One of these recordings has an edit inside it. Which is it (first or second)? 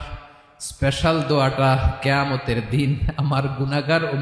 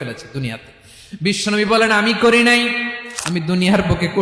second